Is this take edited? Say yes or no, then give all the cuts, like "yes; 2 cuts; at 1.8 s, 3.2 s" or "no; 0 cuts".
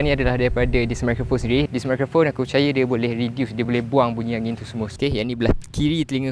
yes; 2 cuts; at 1.7 s, 4.9 s